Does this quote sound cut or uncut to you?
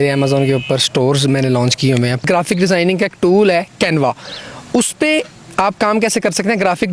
cut